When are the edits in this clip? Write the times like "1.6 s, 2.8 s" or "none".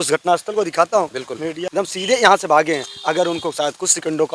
1.6 s